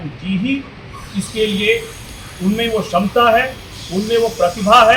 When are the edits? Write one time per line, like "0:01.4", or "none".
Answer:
none